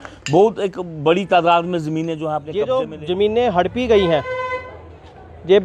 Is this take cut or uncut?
cut